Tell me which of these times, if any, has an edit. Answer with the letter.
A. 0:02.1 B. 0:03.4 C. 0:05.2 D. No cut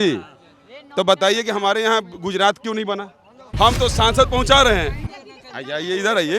B